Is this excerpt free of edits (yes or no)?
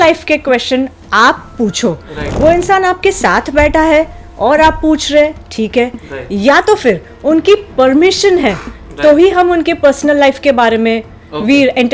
yes